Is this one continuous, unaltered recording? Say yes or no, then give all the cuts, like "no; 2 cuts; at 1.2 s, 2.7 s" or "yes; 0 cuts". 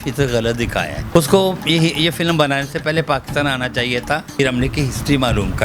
no; 2 cuts; at 1.0 s, 4.4 s